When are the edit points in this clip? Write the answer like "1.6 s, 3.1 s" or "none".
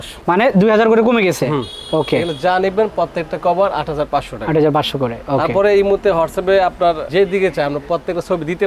none